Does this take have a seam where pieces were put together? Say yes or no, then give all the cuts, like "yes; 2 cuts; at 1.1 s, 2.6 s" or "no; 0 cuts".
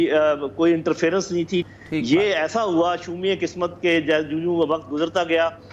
yes; 1 cut; at 1.6 s